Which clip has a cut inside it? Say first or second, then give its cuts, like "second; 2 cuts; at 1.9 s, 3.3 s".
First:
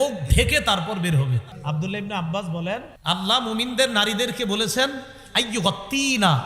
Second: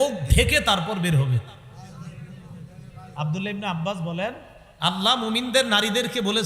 first; 2 cuts; at 1.5 s, 2.9 s